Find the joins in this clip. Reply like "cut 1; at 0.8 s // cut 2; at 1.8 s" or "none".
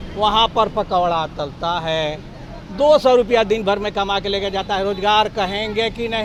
none